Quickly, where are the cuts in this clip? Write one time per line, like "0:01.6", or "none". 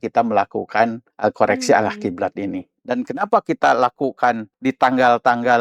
0:01.1
0:02.7
0:04.5